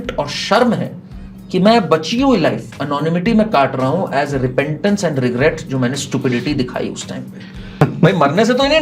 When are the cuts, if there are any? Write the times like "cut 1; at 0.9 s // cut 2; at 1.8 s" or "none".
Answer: cut 1; at 7.6 s